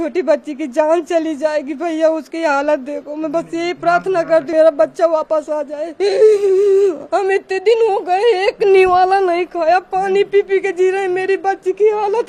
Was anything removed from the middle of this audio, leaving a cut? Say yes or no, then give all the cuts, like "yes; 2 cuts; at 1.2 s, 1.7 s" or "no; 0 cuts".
yes; 1 cut; at 4.5 s